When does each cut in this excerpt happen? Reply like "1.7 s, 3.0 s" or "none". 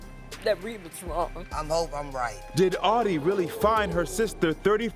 1.5 s, 2.4 s